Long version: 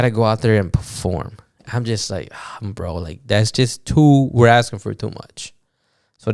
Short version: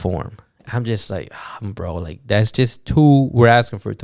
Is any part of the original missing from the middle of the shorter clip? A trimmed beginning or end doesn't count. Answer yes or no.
no